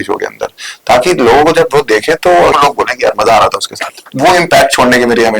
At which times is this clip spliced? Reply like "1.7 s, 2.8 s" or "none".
2.5 s, 4.1 s